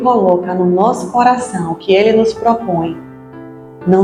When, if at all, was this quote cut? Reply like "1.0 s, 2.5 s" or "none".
none